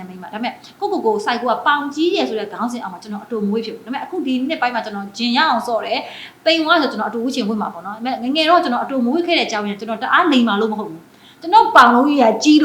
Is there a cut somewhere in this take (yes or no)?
no